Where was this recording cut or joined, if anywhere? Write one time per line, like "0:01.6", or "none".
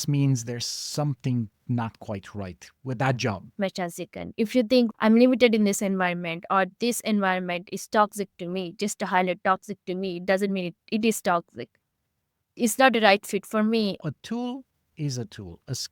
0:03.5
0:14.0

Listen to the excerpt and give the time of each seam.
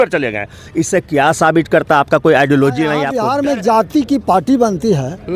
0:03.2

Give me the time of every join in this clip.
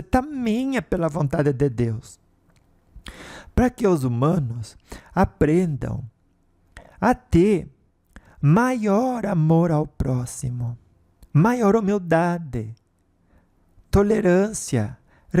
none

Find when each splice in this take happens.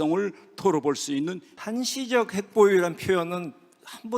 0:01.5

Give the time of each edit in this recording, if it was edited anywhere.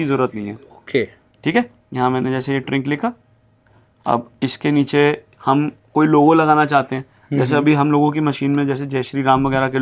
none

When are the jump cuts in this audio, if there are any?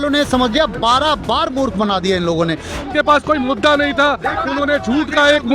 0:02.9

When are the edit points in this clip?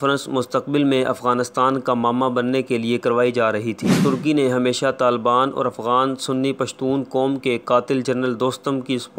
0:04.0

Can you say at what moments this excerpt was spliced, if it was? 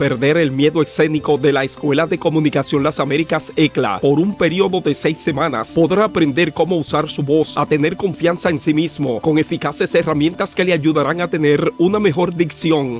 0:04.0

